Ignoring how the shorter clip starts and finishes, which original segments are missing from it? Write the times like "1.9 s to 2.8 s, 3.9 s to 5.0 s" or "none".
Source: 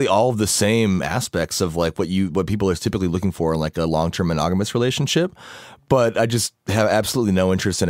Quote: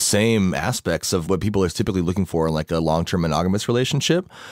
1.7 s to 2.3 s